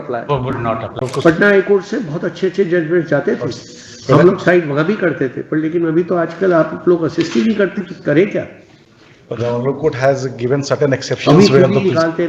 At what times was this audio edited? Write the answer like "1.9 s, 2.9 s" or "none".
1.1 s